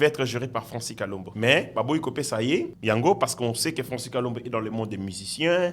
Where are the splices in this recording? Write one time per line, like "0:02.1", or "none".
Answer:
0:01.2
0:02.7